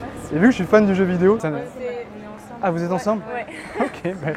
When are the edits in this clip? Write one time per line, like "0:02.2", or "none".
0:01.4